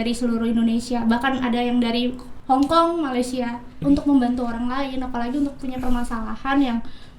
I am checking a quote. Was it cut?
yes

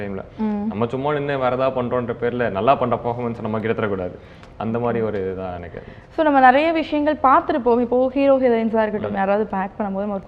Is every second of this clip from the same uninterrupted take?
yes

